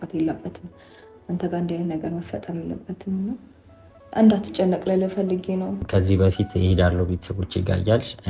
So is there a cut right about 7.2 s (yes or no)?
no